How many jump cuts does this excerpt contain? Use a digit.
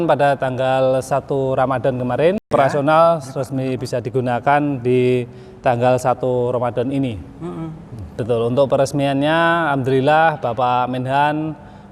2